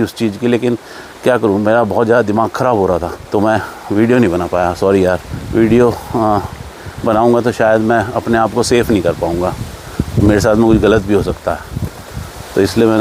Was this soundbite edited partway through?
no; 0 cuts

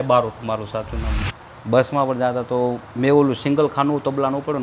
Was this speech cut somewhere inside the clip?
yes; 1 cut; at 1.1 s

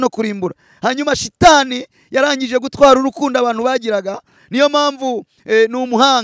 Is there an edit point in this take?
no; 0 cuts

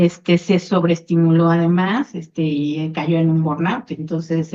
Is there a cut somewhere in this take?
no; 0 cuts

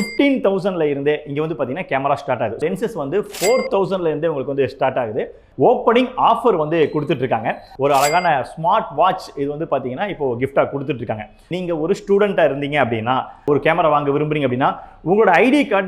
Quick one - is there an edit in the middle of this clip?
yes; 4 cuts; at 2.6 s, 5.4 s, 7.6 s, 11.4 s

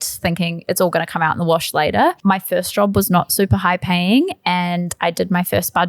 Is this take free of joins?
no; 1 cut; at 2.2 s

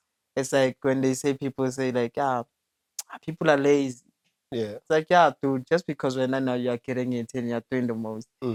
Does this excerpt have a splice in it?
no; 0 cuts

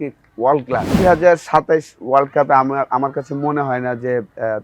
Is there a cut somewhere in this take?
yes; 1 cut; at 1.0 s

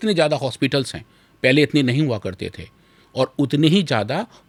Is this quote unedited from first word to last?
yes; 0 cuts

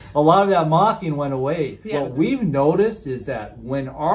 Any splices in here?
yes; 1 cut; at 1.8 s

